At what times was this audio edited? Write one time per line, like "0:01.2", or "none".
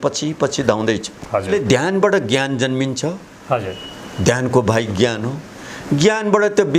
0:01.5